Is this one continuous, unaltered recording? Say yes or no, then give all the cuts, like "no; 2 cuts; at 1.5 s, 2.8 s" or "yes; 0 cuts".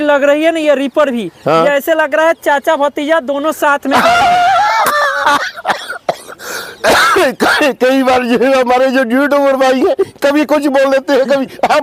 yes; 0 cuts